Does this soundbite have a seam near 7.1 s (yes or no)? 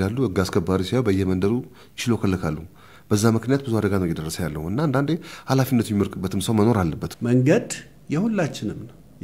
yes